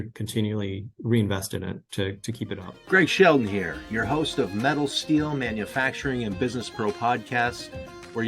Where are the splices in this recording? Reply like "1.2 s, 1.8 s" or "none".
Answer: 2.7 s

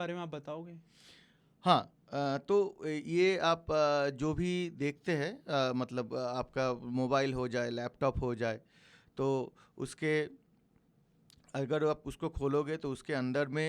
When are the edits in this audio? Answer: none

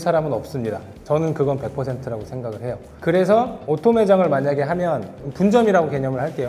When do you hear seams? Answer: none

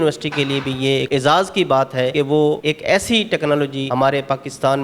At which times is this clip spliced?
1.1 s, 2.3 s, 3.8 s

